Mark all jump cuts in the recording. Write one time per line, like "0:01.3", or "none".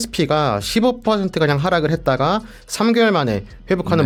none